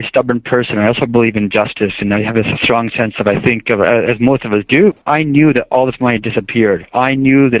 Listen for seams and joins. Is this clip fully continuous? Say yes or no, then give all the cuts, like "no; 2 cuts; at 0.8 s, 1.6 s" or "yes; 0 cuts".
yes; 0 cuts